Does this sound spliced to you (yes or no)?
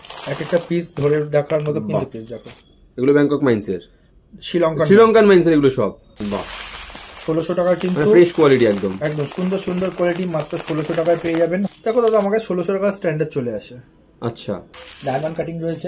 yes